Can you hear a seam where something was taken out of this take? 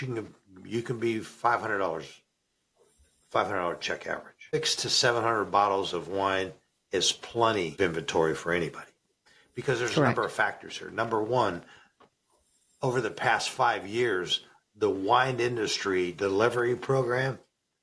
yes; 2 cuts; at 4.5 s, 7.7 s

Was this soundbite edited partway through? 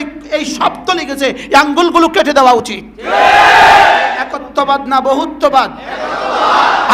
yes; 1 cut; at 4.1 s

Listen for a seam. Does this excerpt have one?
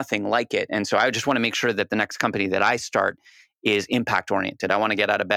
no; 0 cuts

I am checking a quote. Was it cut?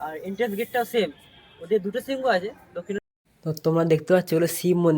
yes; 1 cut; at 3.0 s

